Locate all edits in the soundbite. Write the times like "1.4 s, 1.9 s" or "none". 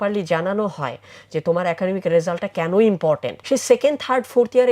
3.3 s

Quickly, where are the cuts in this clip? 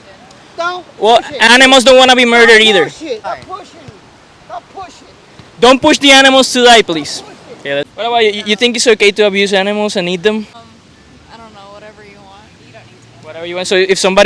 1.3 s, 3.3 s, 7.9 s, 10.5 s

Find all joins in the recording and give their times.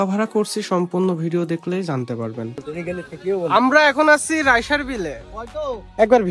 none

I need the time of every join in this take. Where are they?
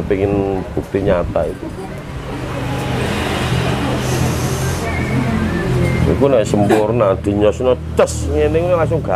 none

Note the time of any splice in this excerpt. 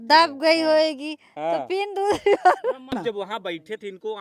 2.9 s

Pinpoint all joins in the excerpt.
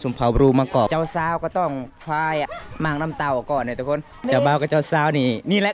0.9 s, 2.5 s, 4.2 s

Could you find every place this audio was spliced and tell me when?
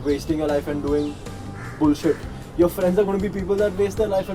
none

